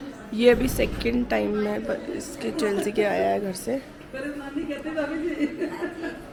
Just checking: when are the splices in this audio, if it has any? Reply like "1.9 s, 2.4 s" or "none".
none